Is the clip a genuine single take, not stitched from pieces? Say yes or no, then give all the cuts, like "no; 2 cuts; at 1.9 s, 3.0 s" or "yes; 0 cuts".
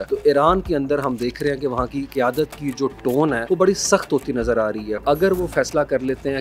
no; 3 cuts; at 2.1 s, 3.4 s, 5.0 s